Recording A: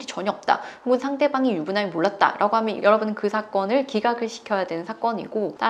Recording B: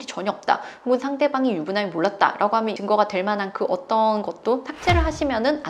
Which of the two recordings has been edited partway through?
B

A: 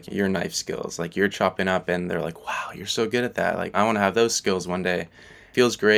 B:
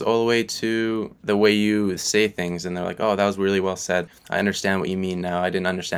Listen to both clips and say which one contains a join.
B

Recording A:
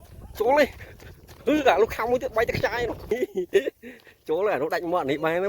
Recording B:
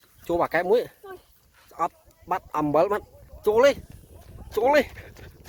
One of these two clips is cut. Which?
A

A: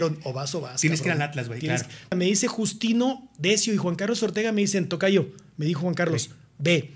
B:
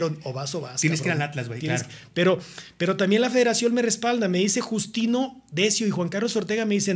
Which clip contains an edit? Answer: A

